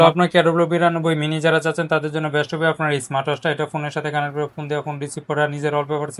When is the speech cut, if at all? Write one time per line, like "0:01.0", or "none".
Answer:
none